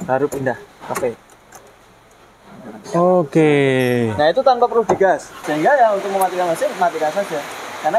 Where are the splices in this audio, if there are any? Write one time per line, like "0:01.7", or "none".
0:05.4